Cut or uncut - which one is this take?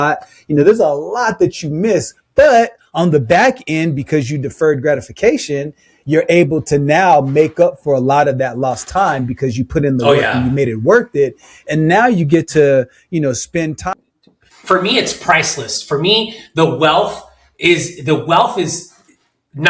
cut